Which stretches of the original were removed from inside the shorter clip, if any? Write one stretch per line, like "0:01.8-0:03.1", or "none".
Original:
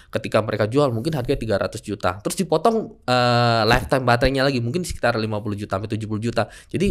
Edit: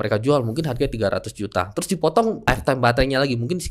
0:03.0-0:03.7